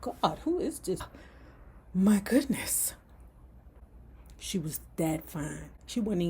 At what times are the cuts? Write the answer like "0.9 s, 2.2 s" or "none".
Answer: 1.1 s